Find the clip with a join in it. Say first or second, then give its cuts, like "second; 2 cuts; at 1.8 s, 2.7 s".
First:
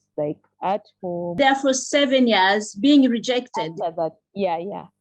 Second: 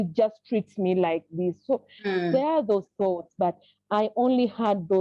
first; 1 cut; at 1.4 s